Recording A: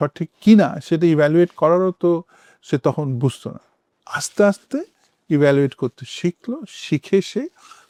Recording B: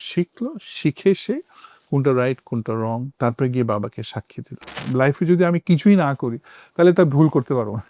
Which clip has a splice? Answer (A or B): B